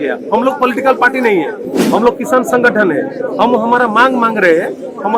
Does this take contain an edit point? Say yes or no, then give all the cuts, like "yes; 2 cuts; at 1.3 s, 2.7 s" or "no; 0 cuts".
no; 0 cuts